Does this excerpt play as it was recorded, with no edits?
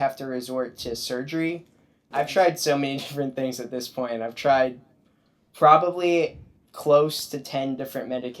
no; 1 cut; at 2.0 s

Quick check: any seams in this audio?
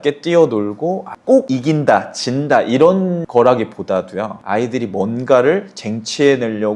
yes; 1 cut; at 1.1 s

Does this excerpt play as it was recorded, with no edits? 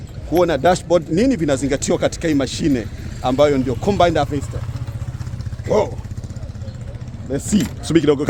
yes; 0 cuts

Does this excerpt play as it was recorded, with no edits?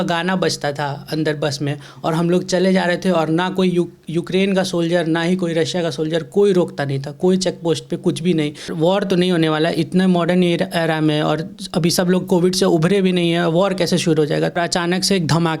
no; 2 cuts; at 8.7 s, 14.5 s

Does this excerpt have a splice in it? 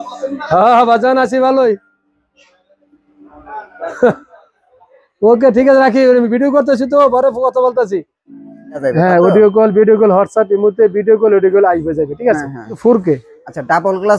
yes; 2 cuts; at 8.9 s, 12.8 s

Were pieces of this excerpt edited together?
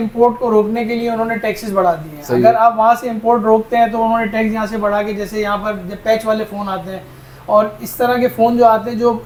no; 0 cuts

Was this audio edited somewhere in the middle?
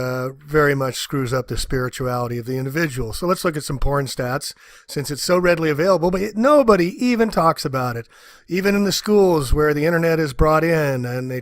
yes; 1 cut; at 1.0 s

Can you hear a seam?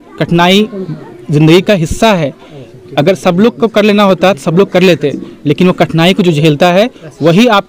no; 0 cuts

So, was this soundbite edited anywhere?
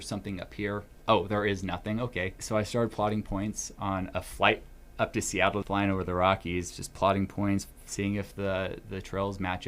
yes; 3 cuts; at 0.9 s, 2.4 s, 5.7 s

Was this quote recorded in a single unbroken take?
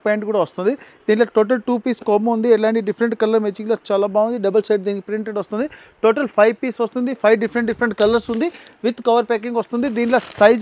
yes; 0 cuts

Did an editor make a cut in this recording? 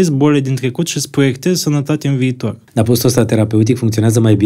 yes; 1 cut; at 2.6 s

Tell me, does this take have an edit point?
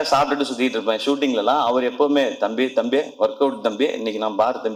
no; 0 cuts

